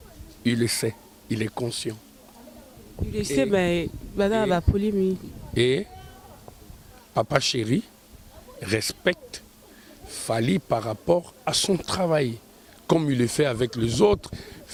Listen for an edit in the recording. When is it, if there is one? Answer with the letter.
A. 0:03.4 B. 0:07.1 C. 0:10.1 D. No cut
D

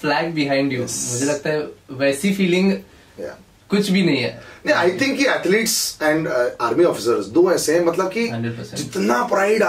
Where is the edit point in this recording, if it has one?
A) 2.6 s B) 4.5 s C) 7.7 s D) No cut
D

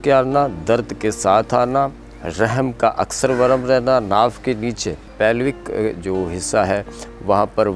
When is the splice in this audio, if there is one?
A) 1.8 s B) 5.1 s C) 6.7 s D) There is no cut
B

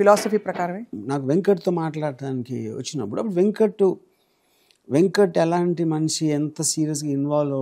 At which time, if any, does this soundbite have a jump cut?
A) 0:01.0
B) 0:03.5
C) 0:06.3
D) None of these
A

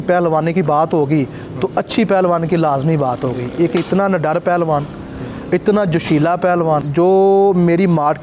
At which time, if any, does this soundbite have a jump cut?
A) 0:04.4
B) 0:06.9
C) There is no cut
B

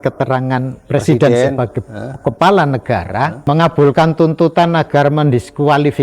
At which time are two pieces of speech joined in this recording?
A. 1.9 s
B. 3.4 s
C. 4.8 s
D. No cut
B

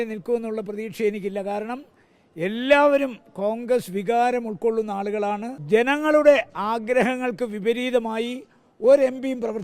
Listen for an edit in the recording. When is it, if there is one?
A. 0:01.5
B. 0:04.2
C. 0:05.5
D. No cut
C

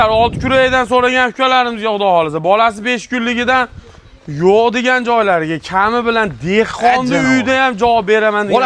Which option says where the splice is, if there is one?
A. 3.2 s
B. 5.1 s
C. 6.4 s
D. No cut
D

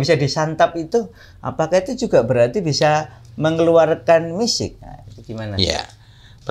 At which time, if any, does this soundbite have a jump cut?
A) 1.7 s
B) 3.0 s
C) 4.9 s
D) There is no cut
D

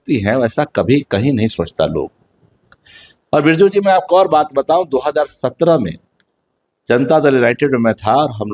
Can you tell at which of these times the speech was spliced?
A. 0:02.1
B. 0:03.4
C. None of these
C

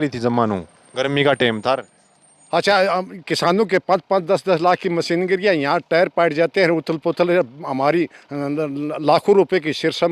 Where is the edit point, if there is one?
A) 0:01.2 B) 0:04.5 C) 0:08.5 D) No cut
D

